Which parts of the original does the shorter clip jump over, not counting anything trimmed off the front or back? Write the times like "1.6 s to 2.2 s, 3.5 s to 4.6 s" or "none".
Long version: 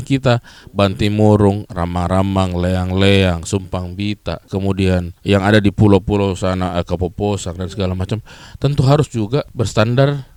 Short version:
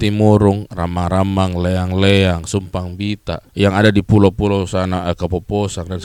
4.4 s to 5.1 s